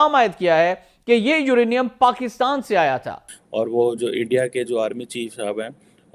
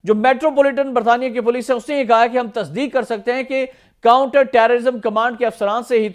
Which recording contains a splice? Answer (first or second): first